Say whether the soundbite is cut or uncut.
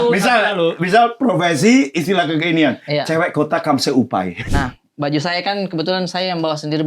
cut